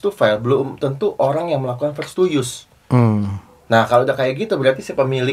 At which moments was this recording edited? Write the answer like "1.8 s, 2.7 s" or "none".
none